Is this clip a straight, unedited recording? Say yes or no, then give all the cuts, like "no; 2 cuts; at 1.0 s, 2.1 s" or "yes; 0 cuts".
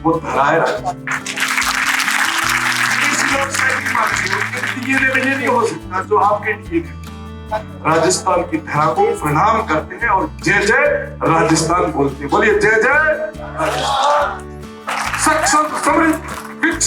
no; 2 cuts; at 7.5 s, 14.9 s